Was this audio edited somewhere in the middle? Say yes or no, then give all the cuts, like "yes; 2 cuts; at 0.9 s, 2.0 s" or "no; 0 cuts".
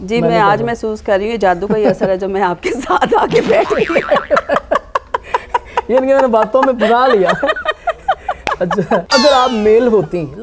no; 0 cuts